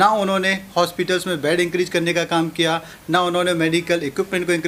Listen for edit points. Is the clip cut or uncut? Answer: uncut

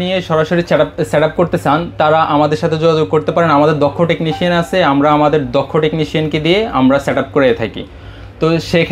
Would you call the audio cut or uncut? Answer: uncut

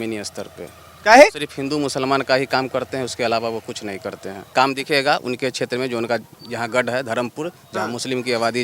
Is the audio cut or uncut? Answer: cut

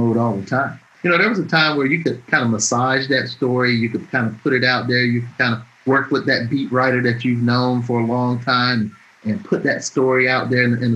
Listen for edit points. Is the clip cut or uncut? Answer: cut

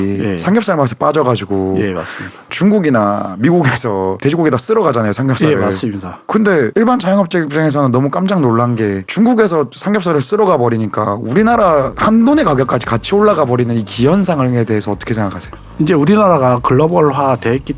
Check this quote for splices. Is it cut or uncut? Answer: uncut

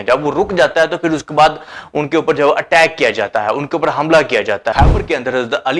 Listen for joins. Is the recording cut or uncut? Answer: cut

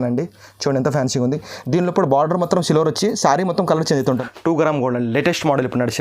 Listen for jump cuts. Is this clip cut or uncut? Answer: cut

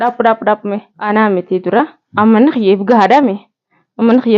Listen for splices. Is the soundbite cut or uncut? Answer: cut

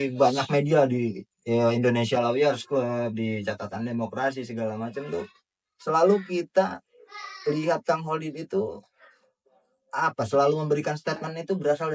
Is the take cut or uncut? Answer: uncut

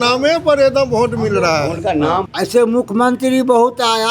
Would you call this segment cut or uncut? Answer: cut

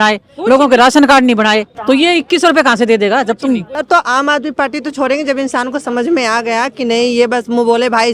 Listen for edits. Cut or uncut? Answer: cut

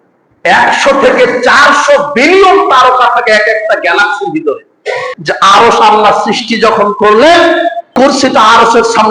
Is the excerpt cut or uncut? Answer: cut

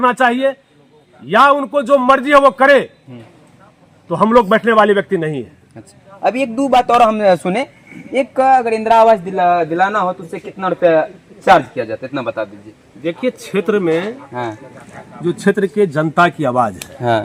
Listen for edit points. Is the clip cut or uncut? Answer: uncut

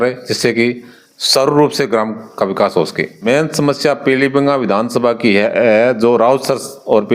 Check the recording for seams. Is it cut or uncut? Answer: cut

